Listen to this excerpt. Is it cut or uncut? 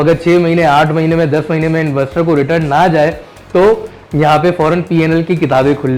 uncut